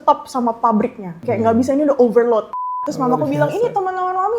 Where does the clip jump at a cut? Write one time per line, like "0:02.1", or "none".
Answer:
0:01.1
0:02.8